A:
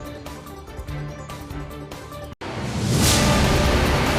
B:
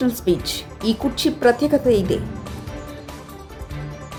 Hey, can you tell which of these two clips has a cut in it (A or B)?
A